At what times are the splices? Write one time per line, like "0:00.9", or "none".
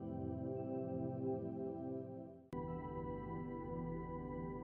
0:02.0